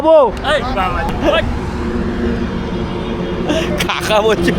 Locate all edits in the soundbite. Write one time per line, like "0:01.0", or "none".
0:01.1